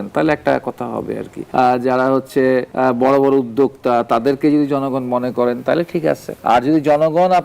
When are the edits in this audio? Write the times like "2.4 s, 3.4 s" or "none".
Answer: 1.3 s, 2.7 s, 6.3 s